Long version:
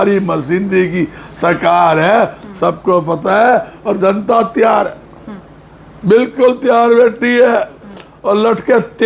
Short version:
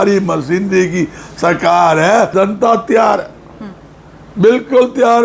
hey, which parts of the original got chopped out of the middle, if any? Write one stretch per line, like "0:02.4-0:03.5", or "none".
0:02.3-0:04.0